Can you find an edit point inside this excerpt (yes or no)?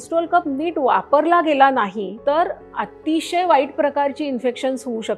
yes